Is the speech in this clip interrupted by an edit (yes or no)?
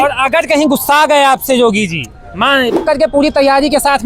yes